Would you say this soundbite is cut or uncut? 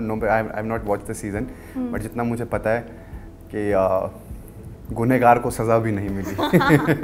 uncut